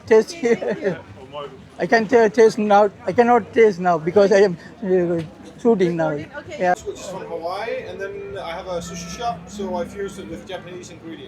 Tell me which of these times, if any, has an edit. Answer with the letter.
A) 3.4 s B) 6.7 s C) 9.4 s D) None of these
B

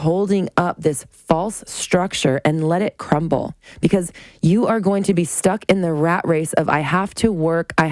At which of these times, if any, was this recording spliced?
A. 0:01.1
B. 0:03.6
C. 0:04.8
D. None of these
B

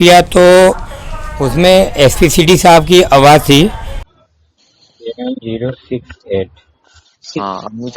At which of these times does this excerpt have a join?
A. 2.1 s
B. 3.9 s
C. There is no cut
B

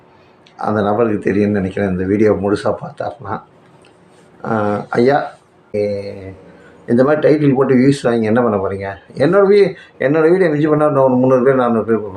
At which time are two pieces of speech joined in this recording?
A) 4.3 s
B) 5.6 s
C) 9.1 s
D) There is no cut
B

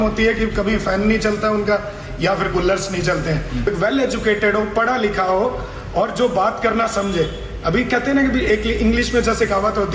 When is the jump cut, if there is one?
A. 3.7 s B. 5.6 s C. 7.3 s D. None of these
A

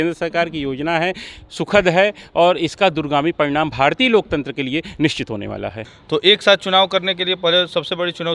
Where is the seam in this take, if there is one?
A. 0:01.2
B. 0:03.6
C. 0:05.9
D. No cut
C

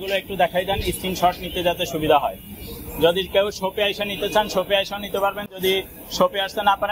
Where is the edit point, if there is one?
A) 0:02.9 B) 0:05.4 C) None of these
C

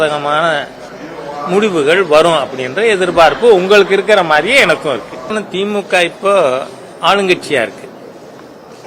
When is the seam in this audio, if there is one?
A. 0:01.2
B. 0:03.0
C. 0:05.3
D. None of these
C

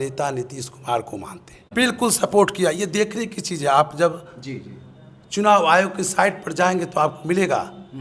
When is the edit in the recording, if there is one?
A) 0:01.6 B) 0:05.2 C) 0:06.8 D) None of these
A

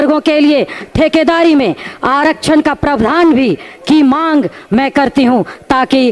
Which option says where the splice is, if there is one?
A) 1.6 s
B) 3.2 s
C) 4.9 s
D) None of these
D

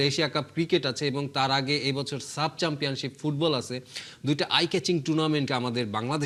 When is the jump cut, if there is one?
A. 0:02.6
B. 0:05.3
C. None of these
C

